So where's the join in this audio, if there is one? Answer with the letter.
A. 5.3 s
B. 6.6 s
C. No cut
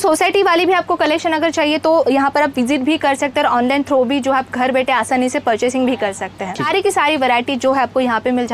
B